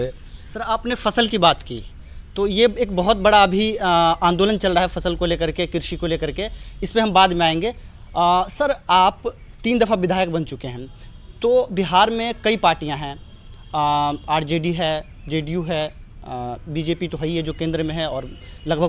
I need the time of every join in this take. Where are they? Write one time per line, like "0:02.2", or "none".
none

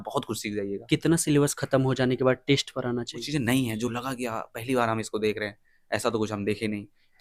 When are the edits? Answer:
0:00.8
0:03.3

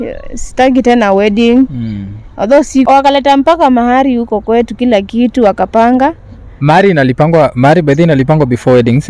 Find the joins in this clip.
0:02.9

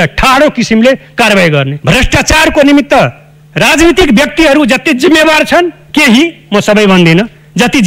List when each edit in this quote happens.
0:01.7

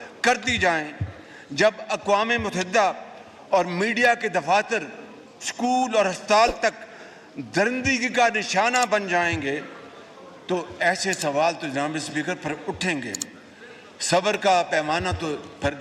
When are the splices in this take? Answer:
none

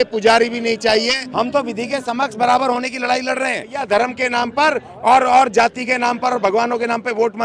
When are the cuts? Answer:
0:01.2
0:03.8

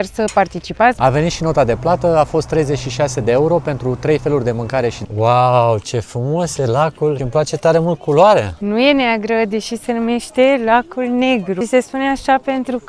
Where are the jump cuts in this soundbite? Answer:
0:01.0
0:05.0
0:07.2
0:08.5
0:11.6

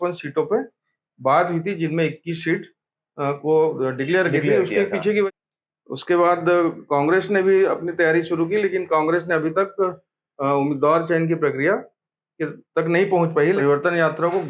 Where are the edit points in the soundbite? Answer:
0:05.3
0:13.6

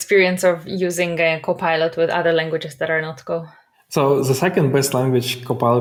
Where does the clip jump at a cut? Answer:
none

